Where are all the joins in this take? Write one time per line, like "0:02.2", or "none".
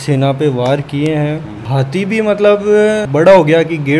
0:01.7